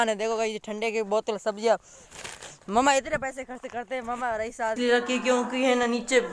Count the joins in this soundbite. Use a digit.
1